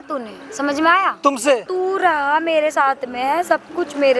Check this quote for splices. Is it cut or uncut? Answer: cut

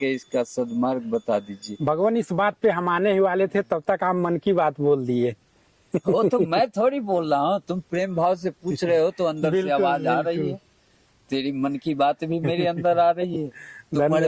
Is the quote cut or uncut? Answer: uncut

